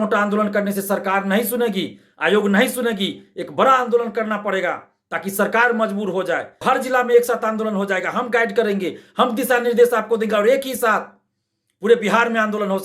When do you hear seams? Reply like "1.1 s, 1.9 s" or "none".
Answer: 6.5 s

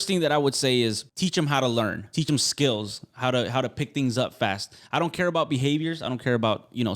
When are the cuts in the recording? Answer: 1.1 s, 2.2 s

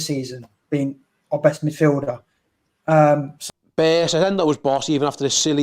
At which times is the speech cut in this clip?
3.4 s

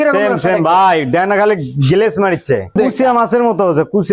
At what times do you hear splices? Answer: 2.7 s

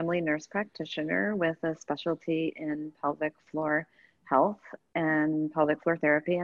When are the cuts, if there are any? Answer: none

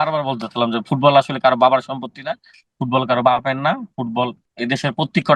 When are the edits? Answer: 4.5 s

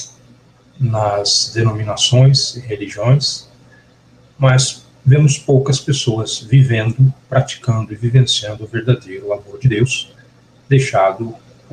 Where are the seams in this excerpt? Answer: 8.6 s

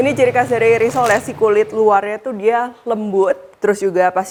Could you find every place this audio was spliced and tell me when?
none

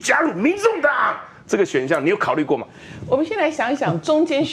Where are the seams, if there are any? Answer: none

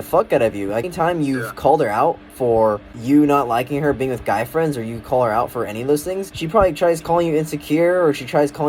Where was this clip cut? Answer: 0.9 s, 2.9 s, 6.3 s

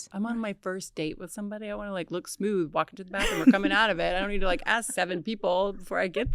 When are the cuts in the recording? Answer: none

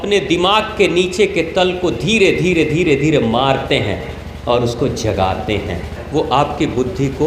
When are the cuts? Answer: 5.9 s

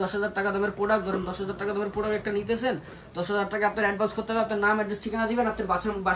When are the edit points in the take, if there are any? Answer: none

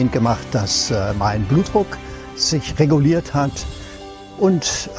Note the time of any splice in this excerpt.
4.1 s

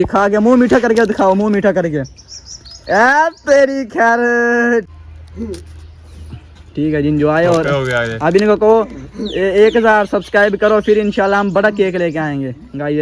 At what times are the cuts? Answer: 4.9 s

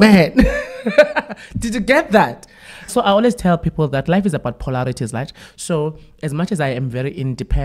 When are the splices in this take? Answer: 2.9 s

